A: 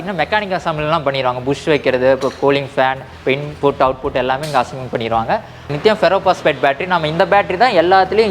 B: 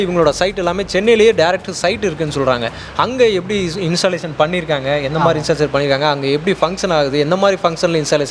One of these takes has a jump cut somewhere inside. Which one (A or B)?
A